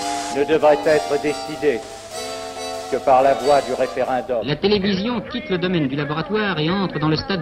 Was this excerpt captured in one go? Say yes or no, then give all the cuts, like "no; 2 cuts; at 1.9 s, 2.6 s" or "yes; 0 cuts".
no; 1 cut; at 4.5 s